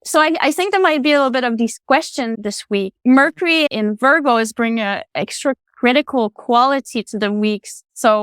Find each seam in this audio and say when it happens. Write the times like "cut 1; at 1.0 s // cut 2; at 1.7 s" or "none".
cut 1; at 2.4 s // cut 2; at 3.7 s